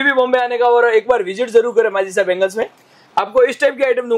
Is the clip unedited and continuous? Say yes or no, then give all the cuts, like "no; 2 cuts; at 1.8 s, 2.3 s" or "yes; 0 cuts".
yes; 0 cuts